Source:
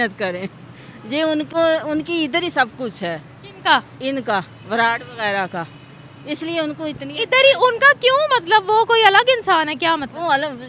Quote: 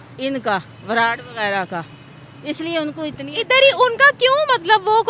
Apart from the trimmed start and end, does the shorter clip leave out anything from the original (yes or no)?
no